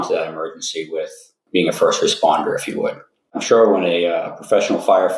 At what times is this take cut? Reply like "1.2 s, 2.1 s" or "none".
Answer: 1.3 s, 3.4 s